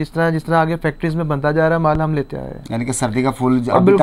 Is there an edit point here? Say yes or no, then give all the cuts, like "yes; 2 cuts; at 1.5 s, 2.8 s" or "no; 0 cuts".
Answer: no; 0 cuts